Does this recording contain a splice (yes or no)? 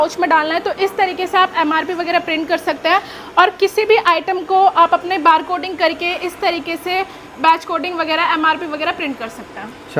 no